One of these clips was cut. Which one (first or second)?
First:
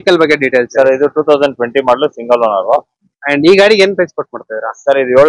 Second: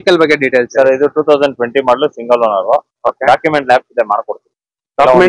first